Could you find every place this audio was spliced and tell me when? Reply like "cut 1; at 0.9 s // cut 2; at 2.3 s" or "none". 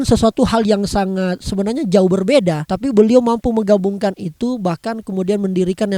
cut 1; at 2.7 s